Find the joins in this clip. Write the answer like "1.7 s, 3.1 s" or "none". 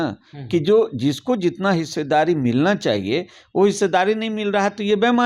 none

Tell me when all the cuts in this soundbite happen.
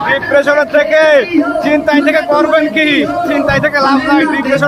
none

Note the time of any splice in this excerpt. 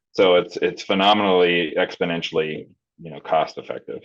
none

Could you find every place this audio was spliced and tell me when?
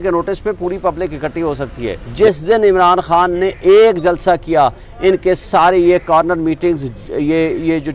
2.0 s

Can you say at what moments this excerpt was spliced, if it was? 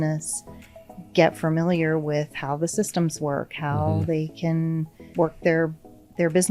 5.0 s

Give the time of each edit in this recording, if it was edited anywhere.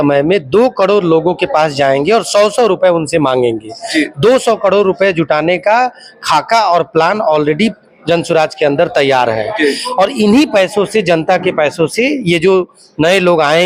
none

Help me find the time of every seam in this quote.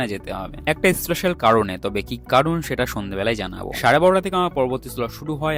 none

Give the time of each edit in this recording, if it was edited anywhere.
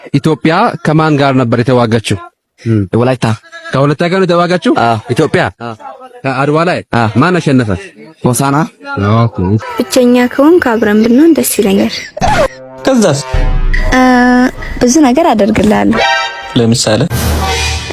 9.4 s

